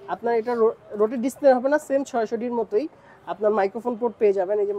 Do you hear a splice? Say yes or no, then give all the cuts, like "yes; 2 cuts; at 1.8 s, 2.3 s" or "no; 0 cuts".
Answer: no; 0 cuts